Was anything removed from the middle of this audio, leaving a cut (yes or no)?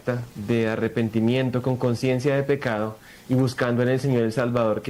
no